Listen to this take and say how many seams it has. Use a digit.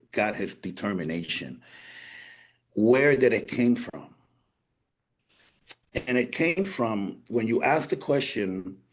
0